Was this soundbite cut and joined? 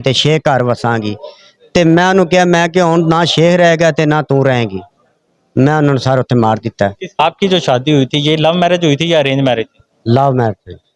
yes; 1 cut; at 7.2 s

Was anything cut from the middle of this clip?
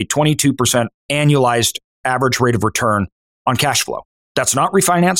yes; 2 cuts; at 3.2 s, 4.1 s

